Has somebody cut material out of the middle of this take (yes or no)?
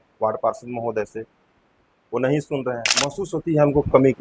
yes